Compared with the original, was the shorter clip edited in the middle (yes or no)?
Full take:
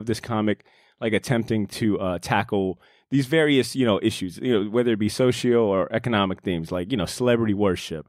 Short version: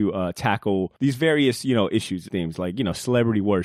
yes